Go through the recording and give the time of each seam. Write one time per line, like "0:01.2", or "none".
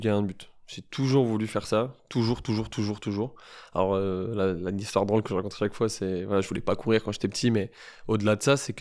none